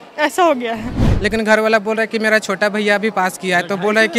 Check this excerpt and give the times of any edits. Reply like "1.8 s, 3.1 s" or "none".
1.0 s